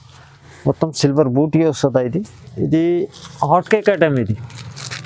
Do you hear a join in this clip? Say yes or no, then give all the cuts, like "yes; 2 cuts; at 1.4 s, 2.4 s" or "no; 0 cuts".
yes; 1 cut; at 2.4 s